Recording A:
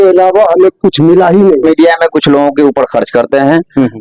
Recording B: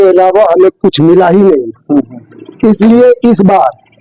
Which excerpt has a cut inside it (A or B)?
A